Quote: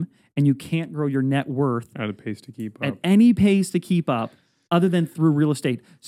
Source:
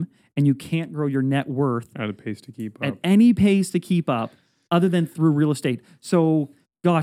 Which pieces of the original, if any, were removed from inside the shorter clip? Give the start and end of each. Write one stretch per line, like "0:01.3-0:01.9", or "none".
none